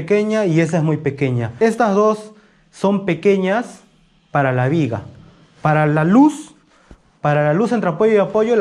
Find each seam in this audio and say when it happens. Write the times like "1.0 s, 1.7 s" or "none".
1.6 s